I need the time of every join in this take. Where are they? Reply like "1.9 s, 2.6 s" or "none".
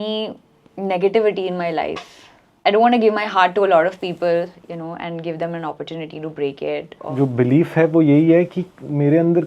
2.4 s, 7.0 s